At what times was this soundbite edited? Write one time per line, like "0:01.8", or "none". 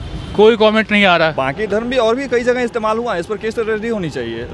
0:01.4